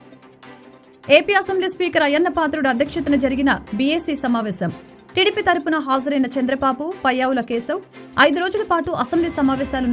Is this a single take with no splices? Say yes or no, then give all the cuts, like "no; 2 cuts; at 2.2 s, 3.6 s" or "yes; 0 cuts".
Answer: no; 1 cut; at 1.1 s